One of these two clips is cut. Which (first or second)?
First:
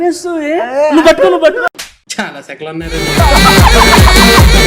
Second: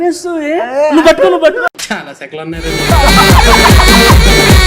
second